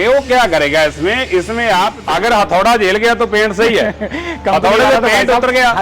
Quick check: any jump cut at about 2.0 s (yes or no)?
yes